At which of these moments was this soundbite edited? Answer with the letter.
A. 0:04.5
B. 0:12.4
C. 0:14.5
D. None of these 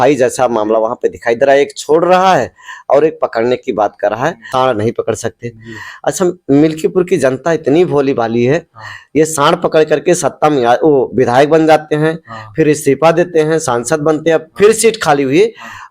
A